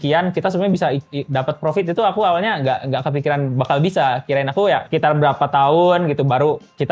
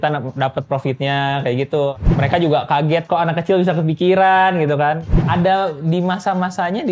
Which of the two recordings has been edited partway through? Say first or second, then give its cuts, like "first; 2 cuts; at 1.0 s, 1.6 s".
second; 2 cuts; at 2.1 s, 5.0 s